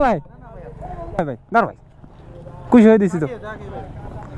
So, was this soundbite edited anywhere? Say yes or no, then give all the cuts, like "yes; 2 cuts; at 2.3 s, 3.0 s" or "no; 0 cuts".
yes; 1 cut; at 1.1 s